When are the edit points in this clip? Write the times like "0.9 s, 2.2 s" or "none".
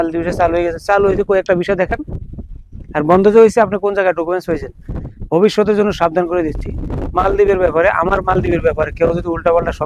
none